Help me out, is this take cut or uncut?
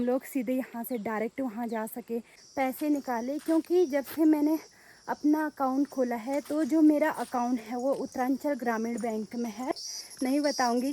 cut